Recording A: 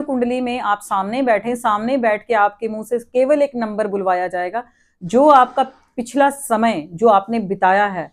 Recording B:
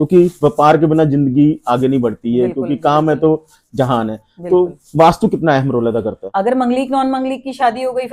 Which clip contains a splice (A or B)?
B